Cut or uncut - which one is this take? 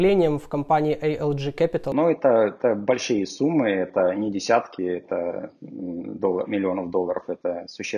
cut